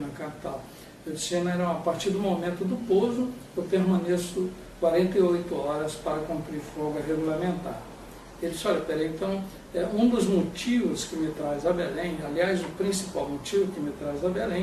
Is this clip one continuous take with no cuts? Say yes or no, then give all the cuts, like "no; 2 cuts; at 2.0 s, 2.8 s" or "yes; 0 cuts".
no; 1 cut; at 2.5 s